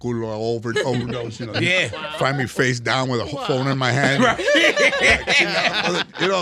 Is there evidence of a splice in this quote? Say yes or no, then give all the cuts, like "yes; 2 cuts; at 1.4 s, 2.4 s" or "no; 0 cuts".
no; 0 cuts